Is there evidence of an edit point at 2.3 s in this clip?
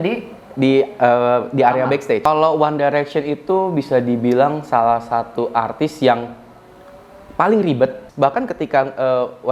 yes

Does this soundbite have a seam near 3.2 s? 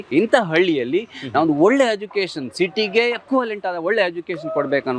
yes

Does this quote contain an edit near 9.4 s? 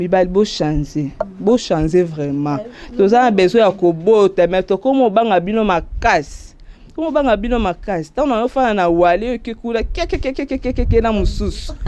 no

